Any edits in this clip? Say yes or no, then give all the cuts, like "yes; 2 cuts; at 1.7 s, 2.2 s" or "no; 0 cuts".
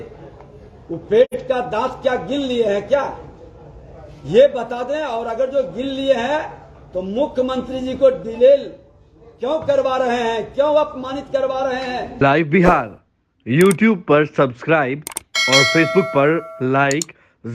no; 0 cuts